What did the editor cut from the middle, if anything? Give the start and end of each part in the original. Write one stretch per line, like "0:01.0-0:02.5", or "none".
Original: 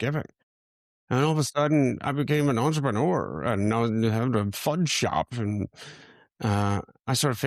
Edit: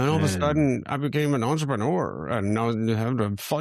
none